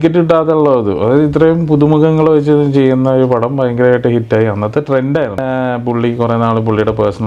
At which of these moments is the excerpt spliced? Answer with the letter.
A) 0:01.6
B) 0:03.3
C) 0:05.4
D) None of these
C